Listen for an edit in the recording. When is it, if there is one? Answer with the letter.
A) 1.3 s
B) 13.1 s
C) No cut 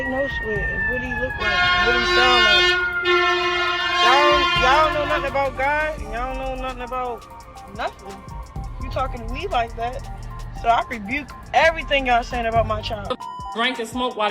B